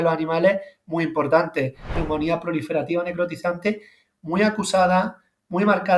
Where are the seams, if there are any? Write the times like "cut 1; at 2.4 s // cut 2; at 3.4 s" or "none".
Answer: cut 1; at 2.0 s

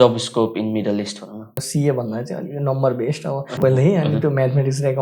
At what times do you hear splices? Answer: cut 1; at 1.6 s // cut 2; at 3.5 s

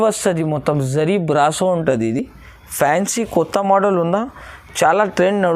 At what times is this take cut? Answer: none

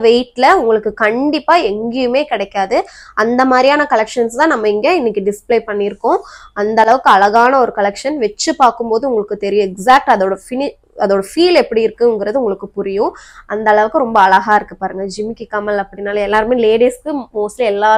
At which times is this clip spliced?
none

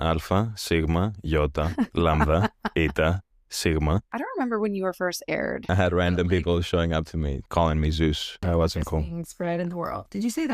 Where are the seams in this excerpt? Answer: cut 1; at 4.1 s // cut 2; at 5.7 s // cut 3; at 7.4 s // cut 4; at 8.4 s

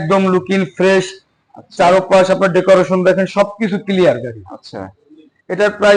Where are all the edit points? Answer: none

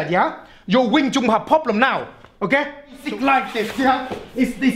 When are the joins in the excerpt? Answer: cut 1; at 3.0 s

